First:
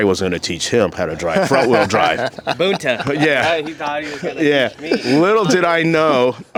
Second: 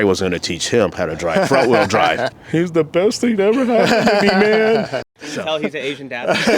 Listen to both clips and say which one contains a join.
second; 2 cuts; at 2.4 s, 5.1 s

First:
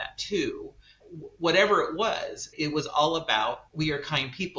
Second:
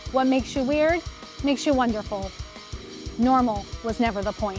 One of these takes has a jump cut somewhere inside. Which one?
first; 3 cuts; at 1.0 s, 2.5 s, 3.7 s

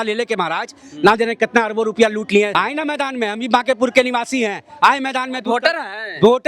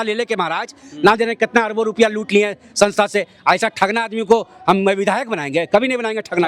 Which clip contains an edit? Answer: first; 1 cut; at 2.5 s

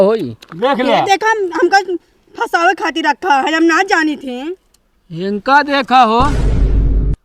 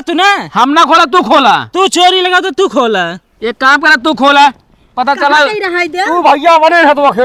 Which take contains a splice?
first; 1 cut; at 6.3 s

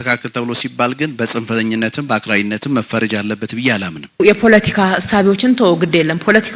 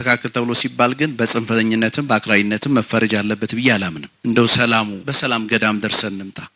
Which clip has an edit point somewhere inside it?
first; 1 cut; at 4.2 s

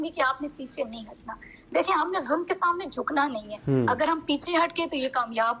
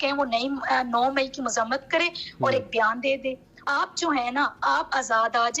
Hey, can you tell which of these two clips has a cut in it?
second; 1 cut; at 3.6 s

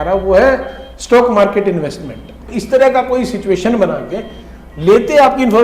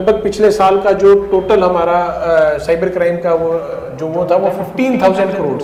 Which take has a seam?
first; 1 cut; at 2.5 s

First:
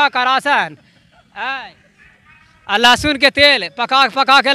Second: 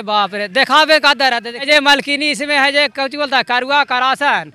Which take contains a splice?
second; 1 cut; at 1.7 s

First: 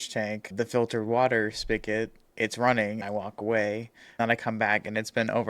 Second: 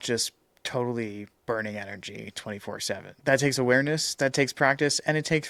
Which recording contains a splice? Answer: first; 3 cuts; at 2.2 s, 3.0 s, 4.2 s

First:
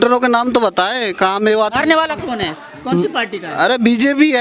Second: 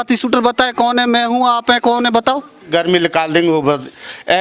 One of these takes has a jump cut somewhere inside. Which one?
second; 1 cut; at 2.6 s

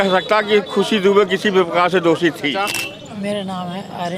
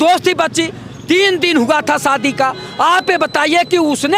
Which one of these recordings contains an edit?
first; 1 cut; at 2.7 s

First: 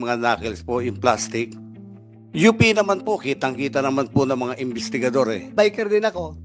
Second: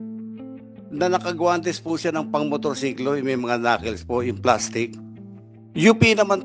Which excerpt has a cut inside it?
first; 1 cut; at 5.4 s

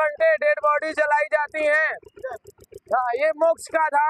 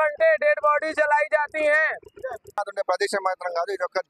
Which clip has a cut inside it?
second; 1 cut; at 2.6 s

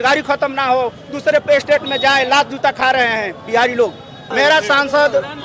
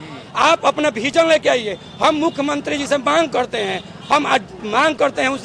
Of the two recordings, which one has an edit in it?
first; 1 cut; at 4.2 s

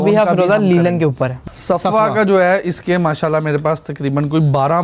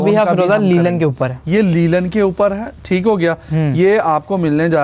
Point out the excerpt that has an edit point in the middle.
first; 1 cut; at 1.4 s

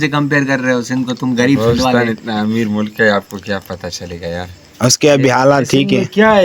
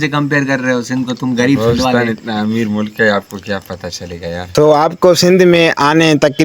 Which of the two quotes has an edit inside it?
second; 1 cut; at 4.5 s

